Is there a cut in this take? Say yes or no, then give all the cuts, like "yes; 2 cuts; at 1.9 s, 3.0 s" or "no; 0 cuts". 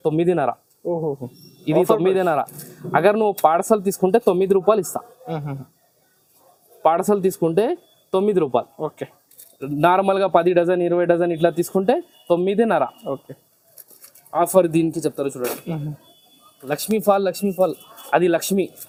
no; 0 cuts